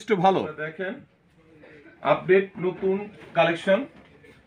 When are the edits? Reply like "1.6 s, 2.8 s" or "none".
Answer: 1.1 s